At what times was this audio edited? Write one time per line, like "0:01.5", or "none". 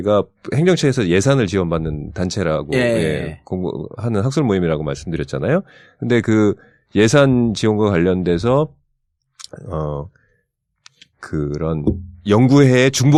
none